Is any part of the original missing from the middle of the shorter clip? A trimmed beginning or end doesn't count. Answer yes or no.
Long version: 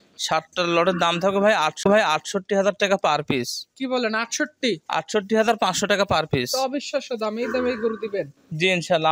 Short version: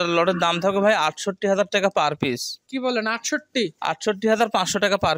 yes